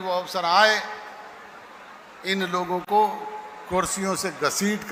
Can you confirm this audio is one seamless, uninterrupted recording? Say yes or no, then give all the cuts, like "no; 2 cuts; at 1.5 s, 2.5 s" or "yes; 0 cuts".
yes; 0 cuts